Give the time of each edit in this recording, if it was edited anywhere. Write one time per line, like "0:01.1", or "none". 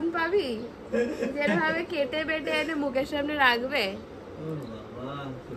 none